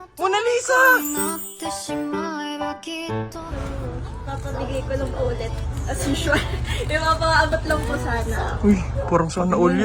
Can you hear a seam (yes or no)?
yes